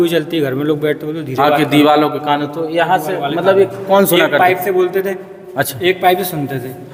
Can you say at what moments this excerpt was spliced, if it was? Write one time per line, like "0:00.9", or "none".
none